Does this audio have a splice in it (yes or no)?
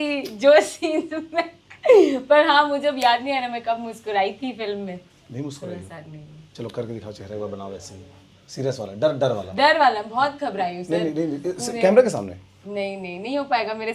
no